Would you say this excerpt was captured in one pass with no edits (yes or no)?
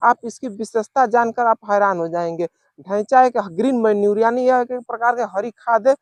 yes